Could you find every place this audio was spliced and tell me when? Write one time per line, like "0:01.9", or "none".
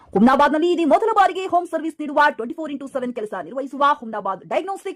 none